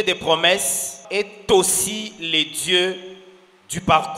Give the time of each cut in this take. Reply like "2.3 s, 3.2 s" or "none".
0.9 s